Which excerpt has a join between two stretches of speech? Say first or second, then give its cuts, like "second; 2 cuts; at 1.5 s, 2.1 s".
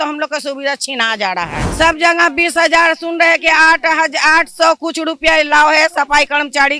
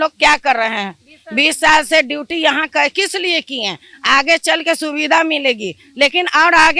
first; 1 cut; at 1.6 s